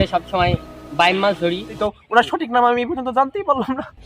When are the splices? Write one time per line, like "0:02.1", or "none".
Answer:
0:01.8